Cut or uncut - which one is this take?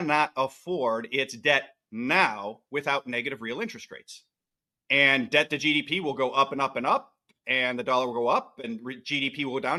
uncut